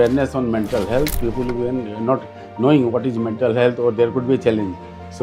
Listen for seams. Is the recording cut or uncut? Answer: uncut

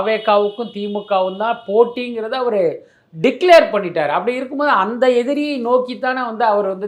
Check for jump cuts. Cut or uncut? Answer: uncut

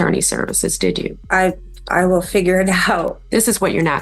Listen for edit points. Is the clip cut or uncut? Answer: cut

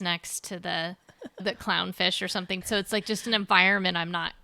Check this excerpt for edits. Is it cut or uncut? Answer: cut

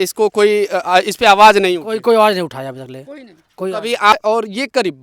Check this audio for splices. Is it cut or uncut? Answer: cut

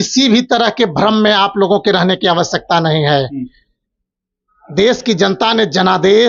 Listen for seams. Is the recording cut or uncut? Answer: uncut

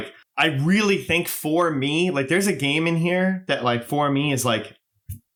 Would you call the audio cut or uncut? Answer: uncut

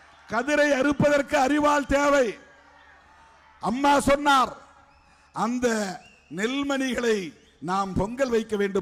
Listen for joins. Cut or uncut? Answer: uncut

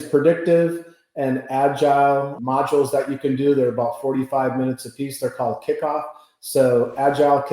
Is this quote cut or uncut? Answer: cut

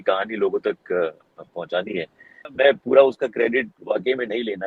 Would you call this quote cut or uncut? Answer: cut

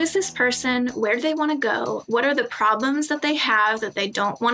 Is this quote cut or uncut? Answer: uncut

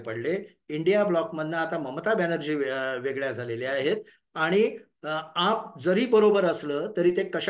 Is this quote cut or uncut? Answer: uncut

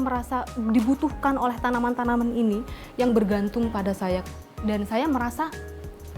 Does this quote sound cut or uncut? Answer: cut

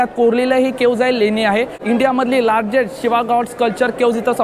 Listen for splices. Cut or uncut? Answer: cut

